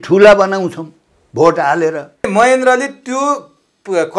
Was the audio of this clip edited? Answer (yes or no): yes